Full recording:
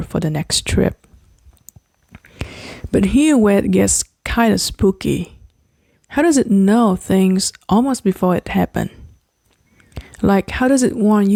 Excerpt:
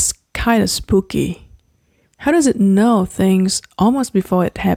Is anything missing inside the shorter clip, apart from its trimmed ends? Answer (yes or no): no